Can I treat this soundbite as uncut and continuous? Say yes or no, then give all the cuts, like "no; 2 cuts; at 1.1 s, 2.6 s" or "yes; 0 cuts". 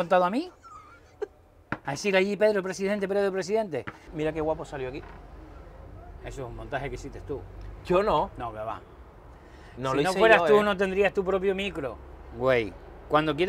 no; 1 cut; at 4.0 s